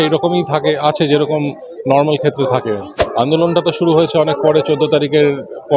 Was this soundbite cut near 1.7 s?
no; 1 cut; at 2.9 s

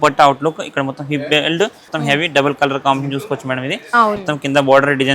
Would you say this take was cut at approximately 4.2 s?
yes; 2 cuts; at 1.8 s, 4.2 s

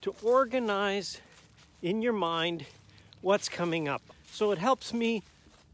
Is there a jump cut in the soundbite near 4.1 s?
yes; 1 cut; at 4.1 s

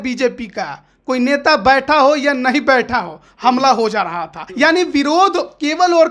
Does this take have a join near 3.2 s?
no; 1 cut; at 4.4 s

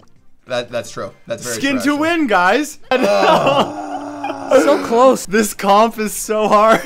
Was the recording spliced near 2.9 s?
yes; 2 cuts; at 2.9 s, 5.2 s

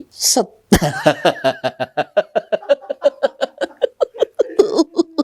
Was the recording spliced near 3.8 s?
no; 0 cuts

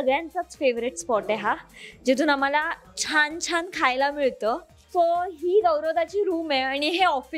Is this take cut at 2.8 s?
no; 1 cut; at 4.7 s

